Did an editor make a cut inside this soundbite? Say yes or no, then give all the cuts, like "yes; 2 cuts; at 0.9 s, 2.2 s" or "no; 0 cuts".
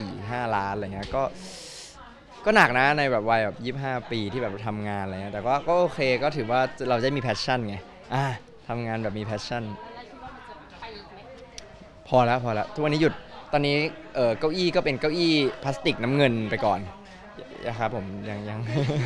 no; 0 cuts